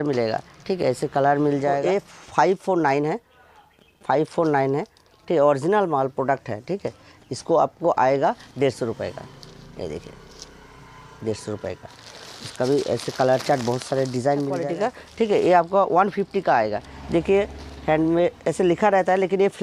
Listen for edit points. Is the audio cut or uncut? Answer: cut